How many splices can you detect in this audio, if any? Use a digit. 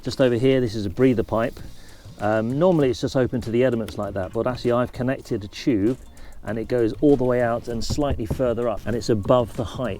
0